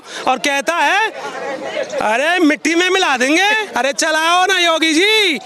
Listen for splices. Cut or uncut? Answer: uncut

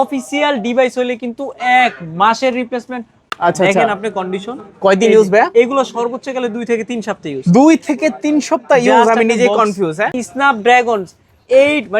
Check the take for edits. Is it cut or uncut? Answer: cut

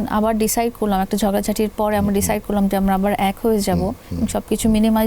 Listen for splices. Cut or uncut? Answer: uncut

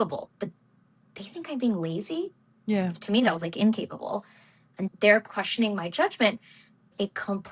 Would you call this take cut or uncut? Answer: uncut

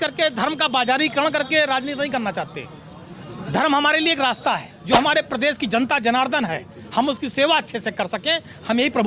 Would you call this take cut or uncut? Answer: cut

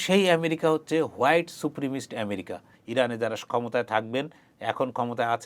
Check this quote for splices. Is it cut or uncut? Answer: cut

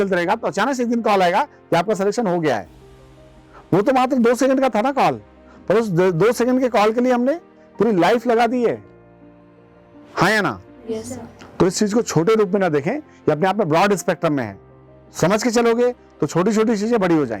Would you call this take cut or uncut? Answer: uncut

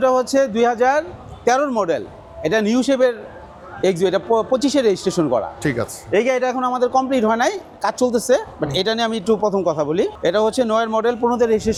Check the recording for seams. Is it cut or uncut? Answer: uncut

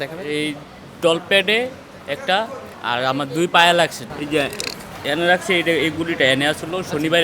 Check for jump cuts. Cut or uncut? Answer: cut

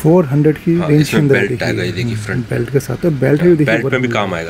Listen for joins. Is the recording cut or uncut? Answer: uncut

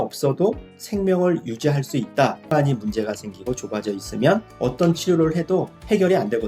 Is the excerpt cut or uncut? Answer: cut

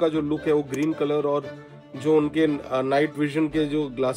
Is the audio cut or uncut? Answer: uncut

